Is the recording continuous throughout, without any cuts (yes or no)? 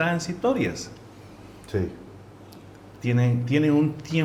yes